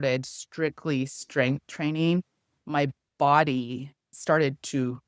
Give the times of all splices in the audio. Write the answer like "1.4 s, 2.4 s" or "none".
3.0 s, 4.2 s

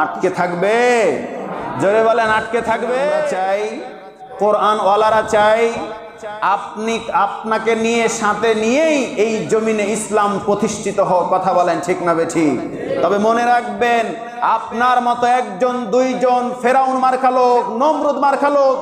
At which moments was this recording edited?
3.4 s

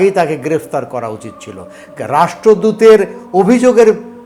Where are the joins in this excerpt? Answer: none

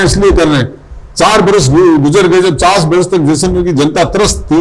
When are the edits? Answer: none

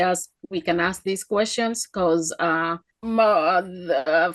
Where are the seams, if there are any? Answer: 2.9 s

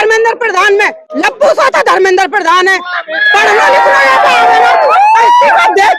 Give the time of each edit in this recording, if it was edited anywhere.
1.0 s

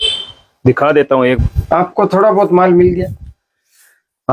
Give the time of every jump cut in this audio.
1.4 s

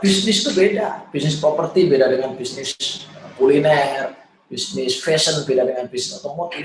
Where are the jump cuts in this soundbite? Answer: none

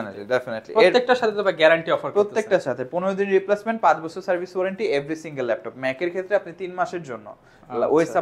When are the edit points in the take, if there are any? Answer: none

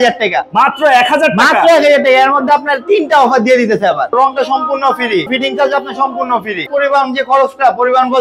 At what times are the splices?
4.1 s, 5.3 s, 6.6 s

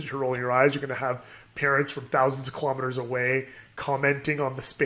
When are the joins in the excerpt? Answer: none

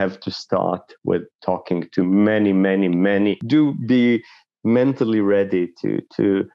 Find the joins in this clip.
3.4 s

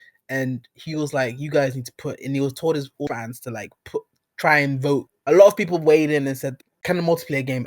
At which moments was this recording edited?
5.1 s, 6.5 s

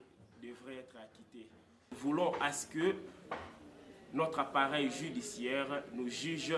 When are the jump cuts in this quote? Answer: 1.9 s

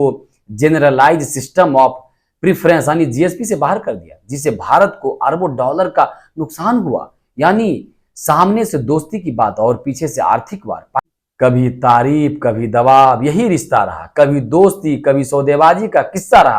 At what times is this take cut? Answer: 11.1 s

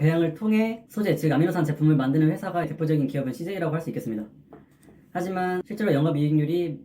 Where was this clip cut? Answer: 2.7 s, 5.6 s

